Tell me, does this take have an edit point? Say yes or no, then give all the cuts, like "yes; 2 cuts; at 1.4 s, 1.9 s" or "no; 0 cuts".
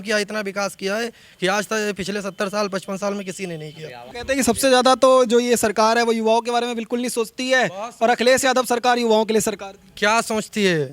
yes; 1 cut; at 4.0 s